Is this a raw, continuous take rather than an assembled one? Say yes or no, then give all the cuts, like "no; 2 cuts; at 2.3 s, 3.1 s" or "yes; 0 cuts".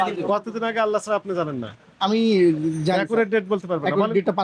yes; 0 cuts